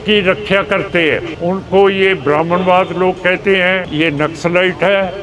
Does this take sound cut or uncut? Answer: cut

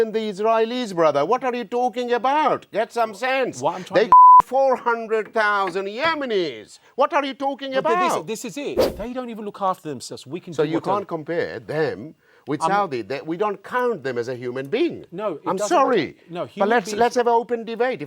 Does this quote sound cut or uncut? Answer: cut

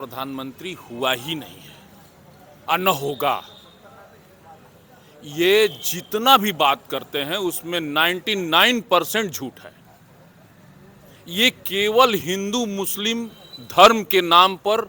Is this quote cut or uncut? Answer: uncut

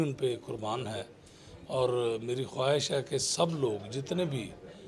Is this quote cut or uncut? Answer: uncut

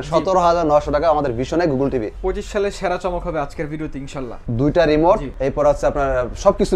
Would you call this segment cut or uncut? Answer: cut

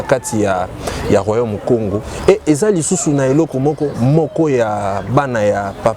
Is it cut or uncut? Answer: cut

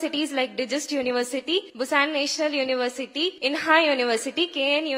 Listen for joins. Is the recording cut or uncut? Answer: cut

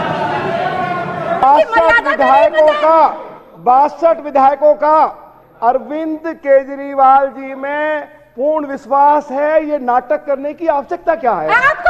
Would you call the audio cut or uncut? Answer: cut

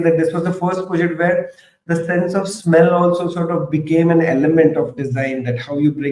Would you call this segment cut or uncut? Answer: uncut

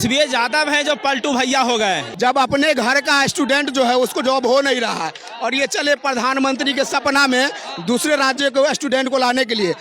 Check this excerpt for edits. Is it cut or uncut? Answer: cut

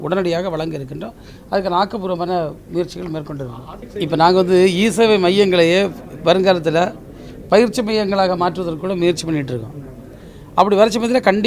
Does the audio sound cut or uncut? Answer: cut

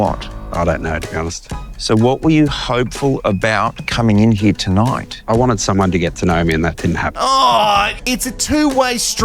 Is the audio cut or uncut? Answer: cut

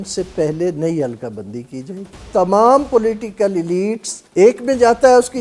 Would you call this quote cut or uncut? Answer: cut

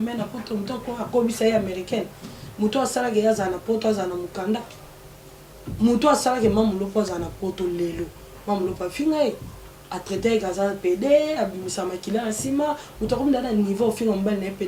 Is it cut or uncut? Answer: uncut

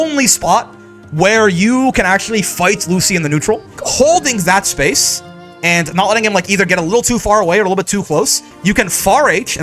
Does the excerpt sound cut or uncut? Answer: cut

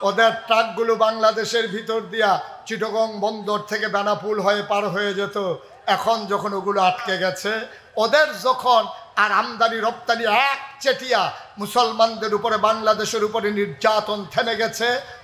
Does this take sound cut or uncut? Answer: uncut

